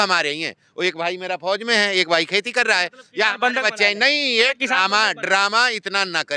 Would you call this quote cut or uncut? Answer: uncut